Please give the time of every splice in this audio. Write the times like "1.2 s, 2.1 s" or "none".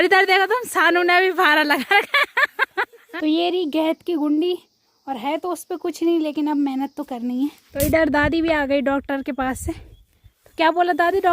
3.0 s, 7.6 s